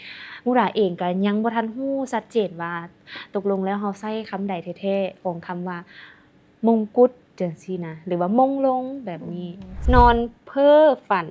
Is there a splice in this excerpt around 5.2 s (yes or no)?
no